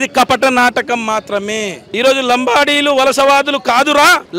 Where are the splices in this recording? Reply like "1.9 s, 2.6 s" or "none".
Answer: 1.8 s